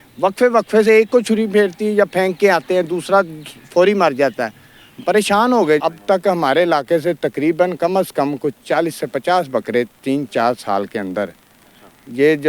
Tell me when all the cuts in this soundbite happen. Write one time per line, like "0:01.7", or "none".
0:05.8